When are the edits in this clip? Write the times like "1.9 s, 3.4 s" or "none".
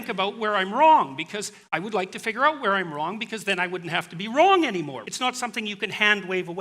5.0 s